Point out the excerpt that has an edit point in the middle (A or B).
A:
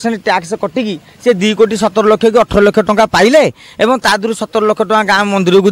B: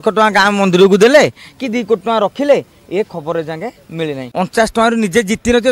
B